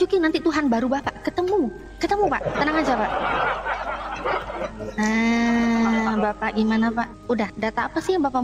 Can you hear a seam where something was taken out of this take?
no; 0 cuts

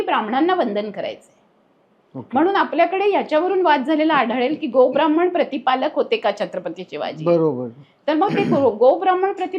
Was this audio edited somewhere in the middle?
no; 0 cuts

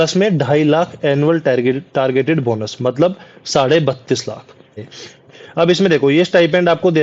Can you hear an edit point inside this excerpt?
yes; 1 cut; at 4.8 s

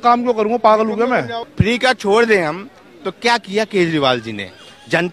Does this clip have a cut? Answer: yes; 1 cut; at 1.4 s

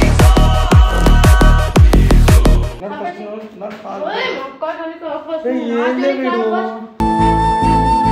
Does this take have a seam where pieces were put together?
no; 0 cuts

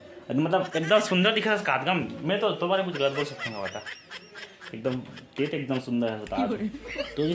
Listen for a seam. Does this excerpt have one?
no; 0 cuts

